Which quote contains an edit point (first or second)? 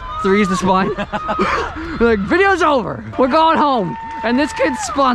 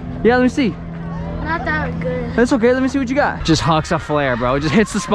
second